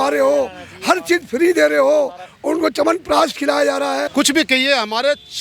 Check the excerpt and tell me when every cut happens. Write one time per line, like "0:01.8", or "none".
0:04.1